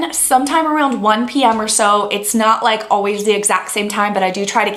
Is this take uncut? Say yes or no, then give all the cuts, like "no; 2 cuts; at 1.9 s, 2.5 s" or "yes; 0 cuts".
yes; 0 cuts